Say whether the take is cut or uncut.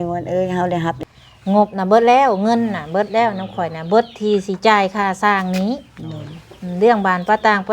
cut